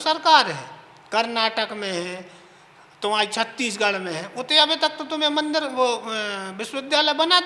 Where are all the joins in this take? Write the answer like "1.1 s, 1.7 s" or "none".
none